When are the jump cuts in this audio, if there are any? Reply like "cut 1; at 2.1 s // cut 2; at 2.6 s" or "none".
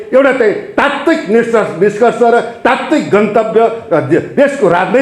none